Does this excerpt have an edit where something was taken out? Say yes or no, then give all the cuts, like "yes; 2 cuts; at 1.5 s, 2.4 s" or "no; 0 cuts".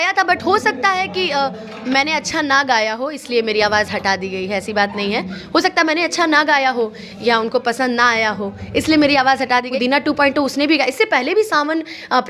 yes; 1 cut; at 9.7 s